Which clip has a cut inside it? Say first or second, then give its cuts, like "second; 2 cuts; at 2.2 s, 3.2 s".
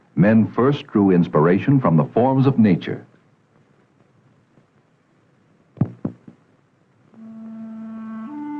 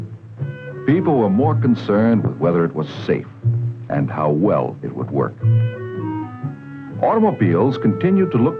second; 1 cut; at 1.4 s